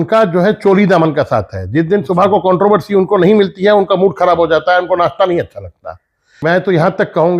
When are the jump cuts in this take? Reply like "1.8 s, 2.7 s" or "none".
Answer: 6.4 s